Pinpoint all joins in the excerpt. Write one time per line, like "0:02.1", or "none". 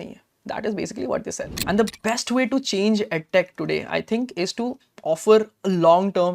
0:01.5